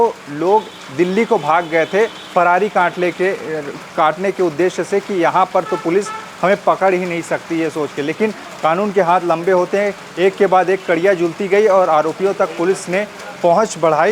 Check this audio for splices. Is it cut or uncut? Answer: uncut